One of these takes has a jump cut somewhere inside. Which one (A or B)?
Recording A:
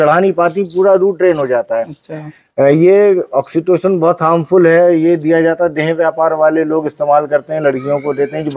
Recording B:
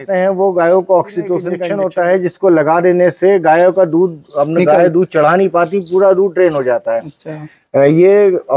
B